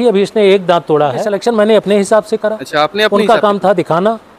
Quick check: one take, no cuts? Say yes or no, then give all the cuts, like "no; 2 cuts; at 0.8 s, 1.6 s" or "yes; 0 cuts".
no; 1 cut; at 1.3 s